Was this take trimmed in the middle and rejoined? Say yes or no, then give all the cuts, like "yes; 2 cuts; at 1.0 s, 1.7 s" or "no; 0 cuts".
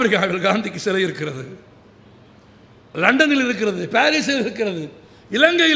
no; 0 cuts